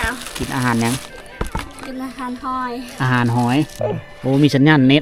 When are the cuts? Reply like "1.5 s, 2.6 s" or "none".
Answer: 3.8 s

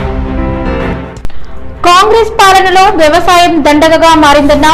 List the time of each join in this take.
0.9 s

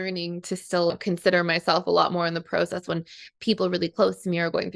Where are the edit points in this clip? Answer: 0.9 s

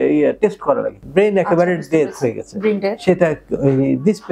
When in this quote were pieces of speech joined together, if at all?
1.0 s

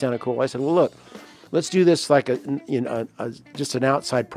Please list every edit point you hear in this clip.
none

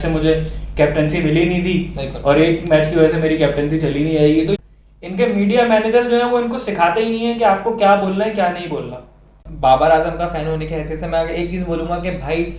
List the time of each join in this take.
4.6 s, 9.4 s

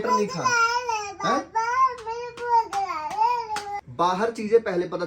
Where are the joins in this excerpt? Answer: 3.9 s

